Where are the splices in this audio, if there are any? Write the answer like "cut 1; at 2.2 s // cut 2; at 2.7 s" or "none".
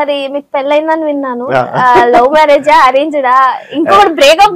none